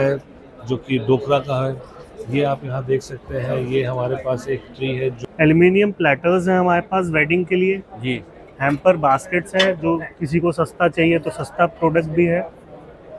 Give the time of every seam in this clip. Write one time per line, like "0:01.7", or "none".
0:05.2